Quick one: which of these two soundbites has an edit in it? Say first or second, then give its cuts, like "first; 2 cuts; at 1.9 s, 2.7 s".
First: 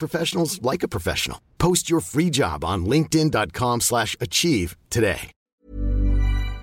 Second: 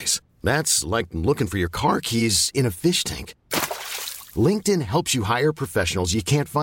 first; 1 cut; at 5.3 s